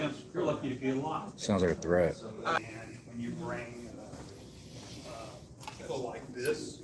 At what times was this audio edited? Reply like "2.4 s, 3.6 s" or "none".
2.6 s

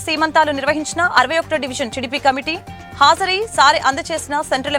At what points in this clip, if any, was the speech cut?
none

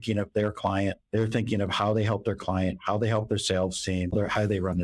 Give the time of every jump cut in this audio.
1.0 s, 4.1 s

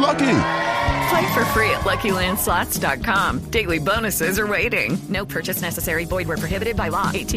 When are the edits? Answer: none

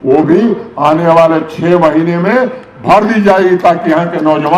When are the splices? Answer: none

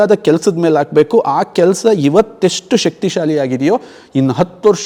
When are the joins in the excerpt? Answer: none

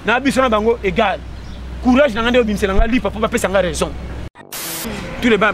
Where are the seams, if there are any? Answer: 4.6 s

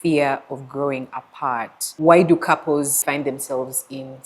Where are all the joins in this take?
1.8 s, 3.0 s

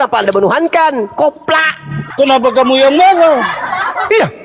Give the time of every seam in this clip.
2.0 s

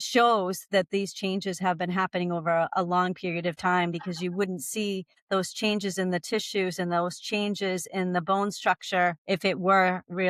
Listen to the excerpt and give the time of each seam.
none

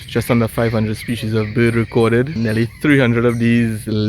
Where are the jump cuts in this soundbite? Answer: 2.3 s

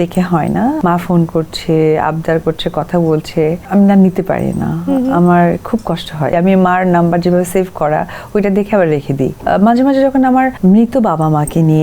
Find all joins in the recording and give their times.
0.8 s, 3.6 s, 6.3 s, 9.4 s, 10.5 s

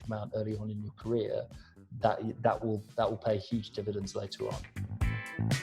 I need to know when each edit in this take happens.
4.7 s

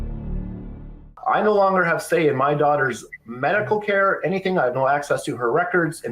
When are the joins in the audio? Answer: 1.0 s

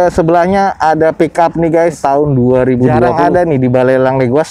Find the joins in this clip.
2.0 s, 3.1 s

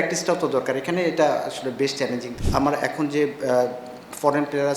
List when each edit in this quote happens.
2.4 s

